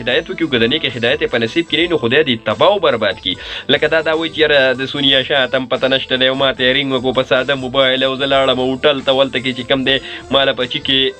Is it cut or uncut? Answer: uncut